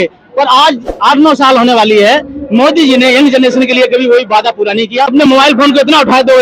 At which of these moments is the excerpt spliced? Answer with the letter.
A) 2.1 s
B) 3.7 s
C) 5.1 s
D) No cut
C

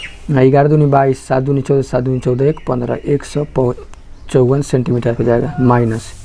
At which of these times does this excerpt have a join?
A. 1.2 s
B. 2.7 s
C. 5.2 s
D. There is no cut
C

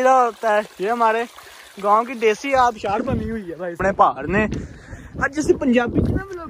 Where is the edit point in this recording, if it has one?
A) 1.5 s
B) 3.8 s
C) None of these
B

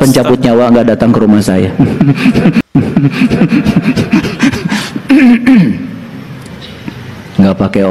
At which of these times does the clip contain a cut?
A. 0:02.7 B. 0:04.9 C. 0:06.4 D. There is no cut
A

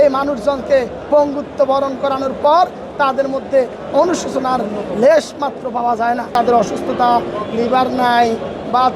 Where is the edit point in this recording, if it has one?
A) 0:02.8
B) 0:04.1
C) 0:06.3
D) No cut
C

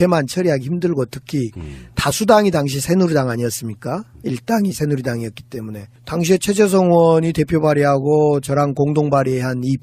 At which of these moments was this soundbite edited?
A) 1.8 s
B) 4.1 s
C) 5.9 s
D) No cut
A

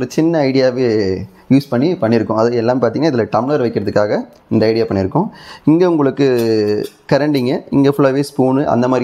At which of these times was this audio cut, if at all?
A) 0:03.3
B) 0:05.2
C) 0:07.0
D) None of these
D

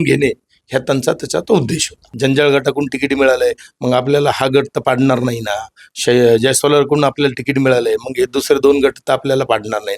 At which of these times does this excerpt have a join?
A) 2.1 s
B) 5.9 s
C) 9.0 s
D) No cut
A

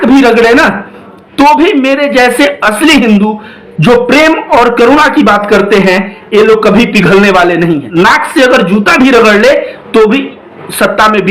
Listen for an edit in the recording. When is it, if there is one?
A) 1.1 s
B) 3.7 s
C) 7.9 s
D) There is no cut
C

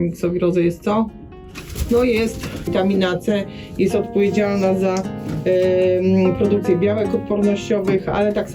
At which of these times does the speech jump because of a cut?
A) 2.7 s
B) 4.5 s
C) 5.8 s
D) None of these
A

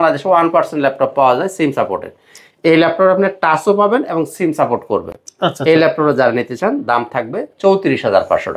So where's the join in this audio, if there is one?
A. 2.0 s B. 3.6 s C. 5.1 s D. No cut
D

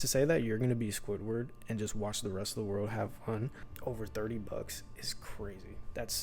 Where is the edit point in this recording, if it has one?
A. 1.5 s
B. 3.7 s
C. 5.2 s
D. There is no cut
B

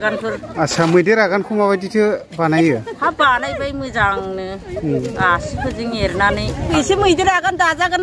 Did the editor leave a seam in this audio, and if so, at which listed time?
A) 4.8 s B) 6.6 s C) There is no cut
B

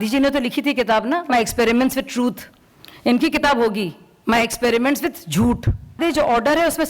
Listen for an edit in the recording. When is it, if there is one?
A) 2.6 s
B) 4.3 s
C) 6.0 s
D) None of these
C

